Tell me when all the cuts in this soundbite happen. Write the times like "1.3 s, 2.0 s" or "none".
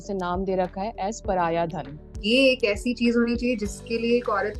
2.2 s